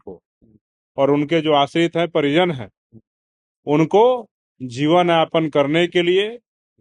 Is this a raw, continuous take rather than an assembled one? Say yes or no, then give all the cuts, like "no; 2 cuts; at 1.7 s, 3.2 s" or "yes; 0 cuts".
yes; 0 cuts